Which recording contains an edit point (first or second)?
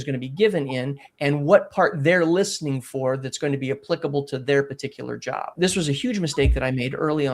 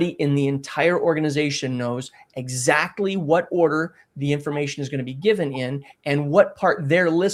first